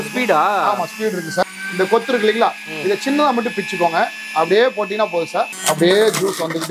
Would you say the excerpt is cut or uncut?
cut